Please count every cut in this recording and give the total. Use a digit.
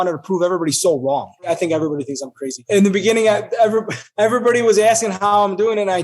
3